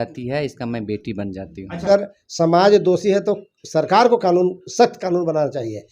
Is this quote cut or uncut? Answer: cut